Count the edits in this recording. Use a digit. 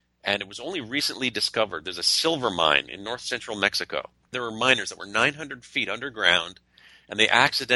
1